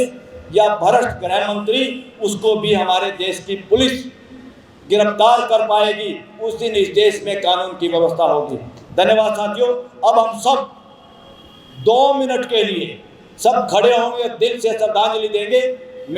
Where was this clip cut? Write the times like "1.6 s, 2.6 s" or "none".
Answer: none